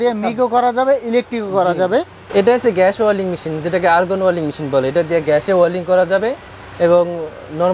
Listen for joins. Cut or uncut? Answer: cut